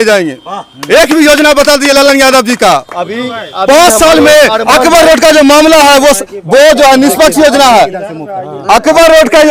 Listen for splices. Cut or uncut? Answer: uncut